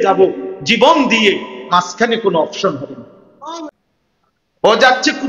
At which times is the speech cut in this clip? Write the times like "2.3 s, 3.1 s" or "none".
3.7 s